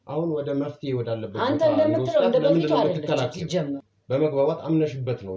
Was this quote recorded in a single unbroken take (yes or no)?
no